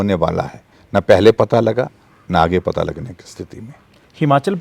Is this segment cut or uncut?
uncut